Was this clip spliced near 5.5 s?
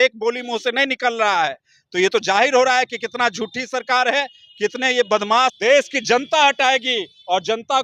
yes; 1 cut; at 5.5 s

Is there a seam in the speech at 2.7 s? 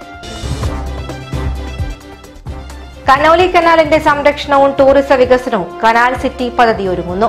yes; 1 cut; at 2.7 s

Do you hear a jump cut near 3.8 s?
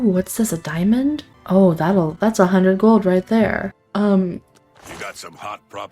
yes; 2 cuts; at 1.3 s, 3.8 s

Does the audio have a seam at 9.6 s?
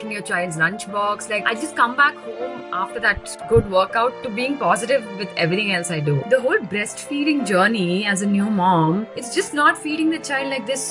no; 2 cuts; at 1.4 s, 6.2 s

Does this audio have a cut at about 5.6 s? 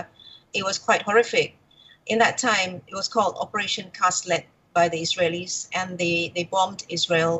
no; 1 cut; at 1.0 s

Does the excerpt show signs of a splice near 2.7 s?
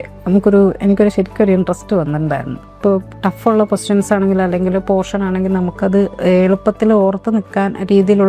yes; 1 cut; at 2.7 s

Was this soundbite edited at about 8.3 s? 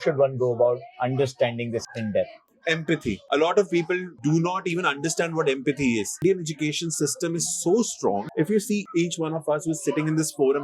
yes; 3 cuts; at 2.4 s, 6.2 s, 8.3 s

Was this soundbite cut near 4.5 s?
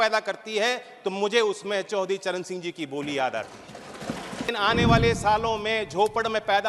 yes; 1 cut; at 4.5 s

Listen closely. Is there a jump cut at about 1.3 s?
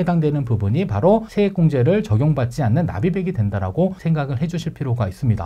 yes; 2 cuts; at 1.3 s, 4.0 s

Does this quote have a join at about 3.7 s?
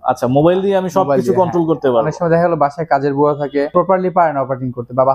yes; 1 cut; at 3.7 s

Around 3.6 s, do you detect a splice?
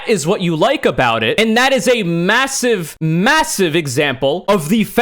no; 1 cut; at 1.4 s

